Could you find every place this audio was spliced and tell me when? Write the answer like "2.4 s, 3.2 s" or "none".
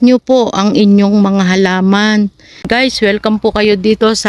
2.7 s